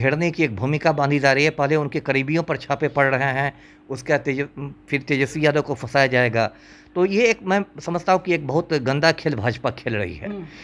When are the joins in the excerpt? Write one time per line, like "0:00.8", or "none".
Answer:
none